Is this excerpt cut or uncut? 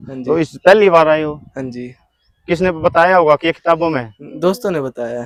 uncut